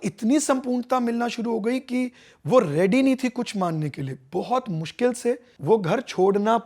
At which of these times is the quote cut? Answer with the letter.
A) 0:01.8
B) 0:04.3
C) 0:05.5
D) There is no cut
C